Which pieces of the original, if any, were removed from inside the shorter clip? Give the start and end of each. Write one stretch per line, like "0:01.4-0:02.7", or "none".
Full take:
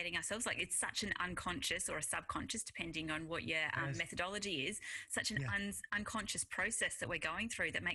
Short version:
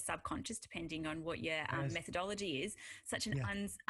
none